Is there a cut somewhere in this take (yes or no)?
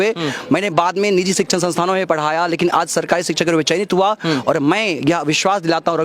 no